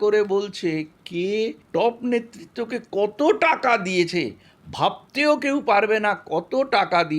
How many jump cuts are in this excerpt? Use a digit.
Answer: 1